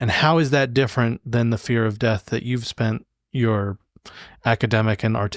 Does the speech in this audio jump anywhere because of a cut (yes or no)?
no